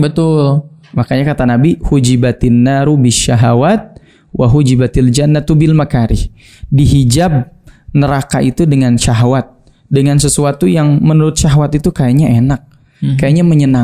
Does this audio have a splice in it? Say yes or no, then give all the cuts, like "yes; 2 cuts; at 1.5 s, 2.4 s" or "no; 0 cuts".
no; 0 cuts